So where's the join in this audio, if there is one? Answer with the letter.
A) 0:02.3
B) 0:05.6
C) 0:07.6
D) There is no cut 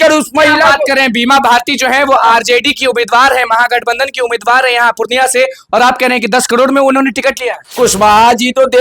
C